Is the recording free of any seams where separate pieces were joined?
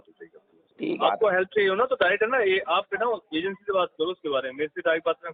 no; 1 cut; at 1.0 s

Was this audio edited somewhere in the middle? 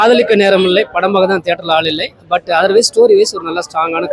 no; 0 cuts

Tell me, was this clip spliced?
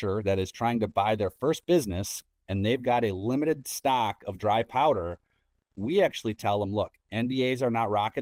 no; 0 cuts

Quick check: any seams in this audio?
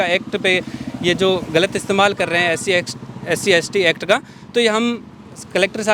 no; 0 cuts

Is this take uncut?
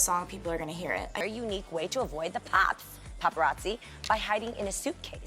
no; 1 cut; at 1.1 s

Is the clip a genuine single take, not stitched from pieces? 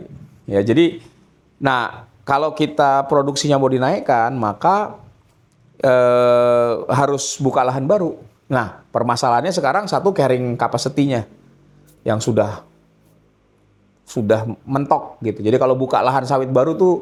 yes; 0 cuts

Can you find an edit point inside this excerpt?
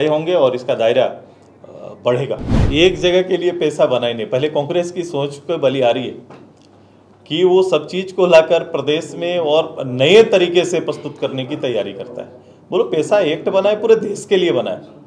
yes; 1 cut; at 2.5 s

